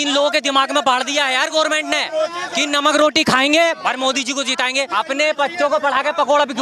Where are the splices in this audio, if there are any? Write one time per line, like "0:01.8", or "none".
0:04.9